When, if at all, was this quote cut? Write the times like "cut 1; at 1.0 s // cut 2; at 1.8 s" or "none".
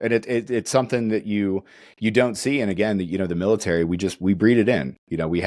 none